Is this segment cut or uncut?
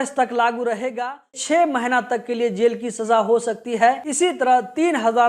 cut